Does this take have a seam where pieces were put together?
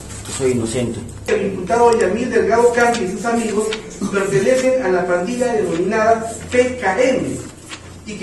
yes; 1 cut; at 1.3 s

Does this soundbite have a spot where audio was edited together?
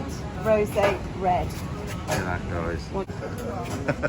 yes; 1 cut; at 3.1 s

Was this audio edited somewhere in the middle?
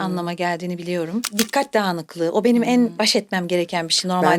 yes; 2 cuts; at 1.3 s, 2.9 s

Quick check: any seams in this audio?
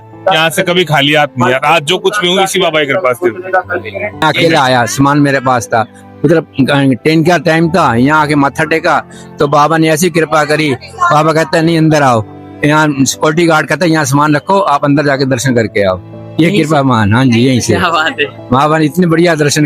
yes; 1 cut; at 4.2 s

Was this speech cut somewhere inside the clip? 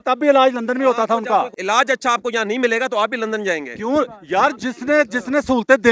yes; 1 cut; at 1.5 s

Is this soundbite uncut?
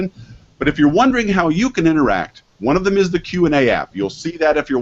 no; 1 cut; at 3.6 s

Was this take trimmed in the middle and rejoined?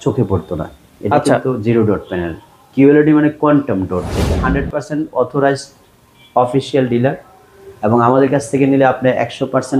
yes; 1 cut; at 4.4 s

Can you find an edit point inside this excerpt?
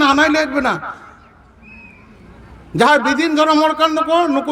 no; 0 cuts

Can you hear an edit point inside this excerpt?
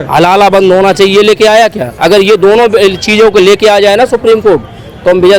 no; 0 cuts

